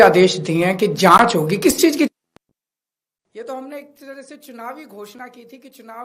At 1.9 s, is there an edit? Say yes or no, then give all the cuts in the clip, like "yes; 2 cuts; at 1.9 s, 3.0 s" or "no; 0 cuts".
no; 0 cuts